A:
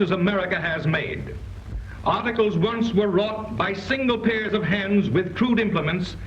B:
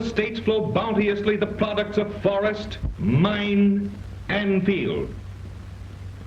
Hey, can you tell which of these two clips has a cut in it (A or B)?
A